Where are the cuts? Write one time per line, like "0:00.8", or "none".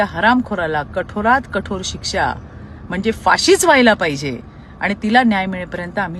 none